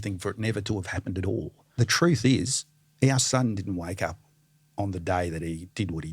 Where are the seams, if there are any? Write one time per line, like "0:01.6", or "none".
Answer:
0:01.6